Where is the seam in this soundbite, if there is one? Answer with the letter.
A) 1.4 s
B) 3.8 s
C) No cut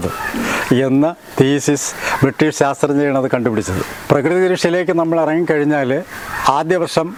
C